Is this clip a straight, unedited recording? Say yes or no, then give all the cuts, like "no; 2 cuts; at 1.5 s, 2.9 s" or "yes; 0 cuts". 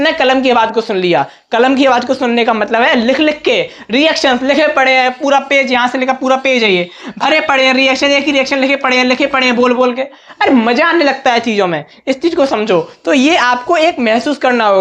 yes; 0 cuts